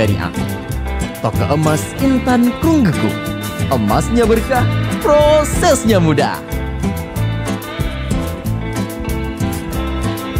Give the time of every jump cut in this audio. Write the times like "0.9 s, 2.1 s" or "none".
none

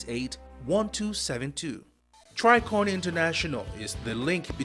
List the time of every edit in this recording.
2.2 s

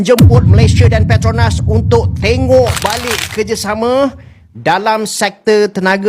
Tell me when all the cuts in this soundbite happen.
none

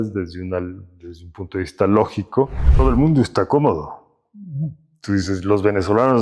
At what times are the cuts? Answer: 2.8 s

